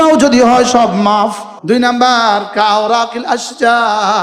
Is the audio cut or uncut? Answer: uncut